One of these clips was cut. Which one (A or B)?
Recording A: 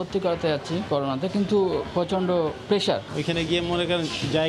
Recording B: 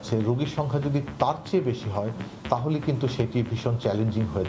A